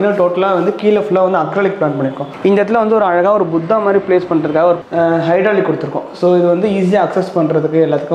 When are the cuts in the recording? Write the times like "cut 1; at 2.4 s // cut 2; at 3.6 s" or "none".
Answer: cut 1; at 2.3 s // cut 2; at 4.8 s

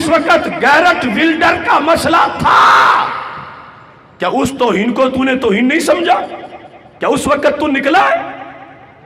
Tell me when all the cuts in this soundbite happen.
none

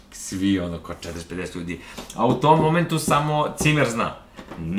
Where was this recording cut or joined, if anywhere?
none

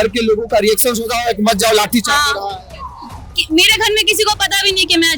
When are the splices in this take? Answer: none

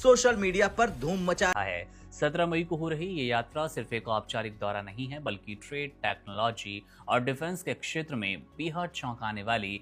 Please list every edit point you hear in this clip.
cut 1; at 1.5 s

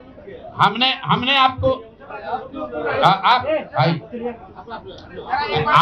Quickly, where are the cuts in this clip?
none

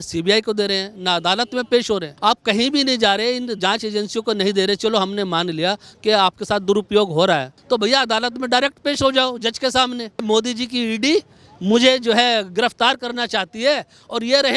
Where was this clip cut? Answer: cut 1; at 2.1 s // cut 2; at 7.5 s // cut 3; at 10.2 s

